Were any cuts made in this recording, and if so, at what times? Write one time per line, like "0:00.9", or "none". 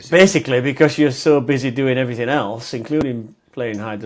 none